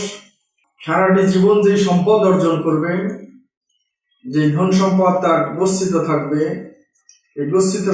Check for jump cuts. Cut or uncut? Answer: uncut